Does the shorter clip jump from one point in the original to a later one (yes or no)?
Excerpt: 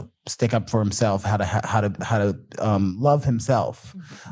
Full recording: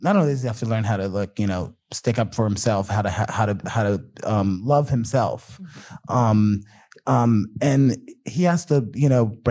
no